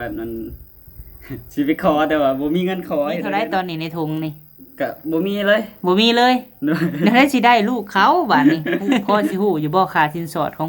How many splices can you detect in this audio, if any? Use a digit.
2